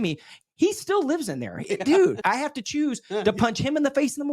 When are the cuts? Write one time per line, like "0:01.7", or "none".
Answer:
0:02.2